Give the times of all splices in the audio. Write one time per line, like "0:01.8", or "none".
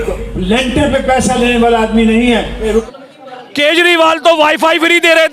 0:02.8